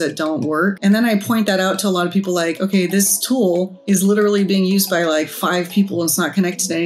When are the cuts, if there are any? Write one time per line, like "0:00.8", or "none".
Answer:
0:00.8
0:03.8